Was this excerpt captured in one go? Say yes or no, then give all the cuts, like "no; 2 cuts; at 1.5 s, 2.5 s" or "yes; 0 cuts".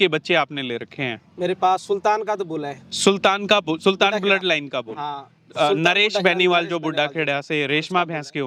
yes; 0 cuts